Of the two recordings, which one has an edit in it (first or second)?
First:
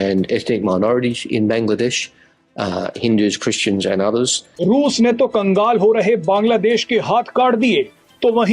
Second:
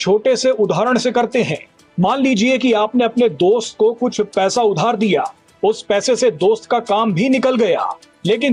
first